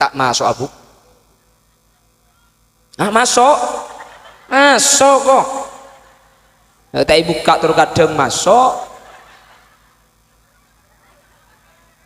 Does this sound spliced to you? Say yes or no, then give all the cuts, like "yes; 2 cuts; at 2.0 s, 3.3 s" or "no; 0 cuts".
no; 0 cuts